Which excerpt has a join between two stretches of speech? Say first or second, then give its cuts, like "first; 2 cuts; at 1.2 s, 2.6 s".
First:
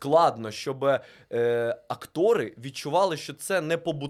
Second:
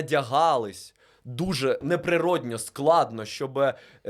second; 1 cut; at 1.8 s